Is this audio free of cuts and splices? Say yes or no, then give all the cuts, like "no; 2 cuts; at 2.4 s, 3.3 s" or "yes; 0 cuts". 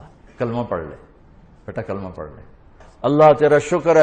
no; 1 cut; at 2.8 s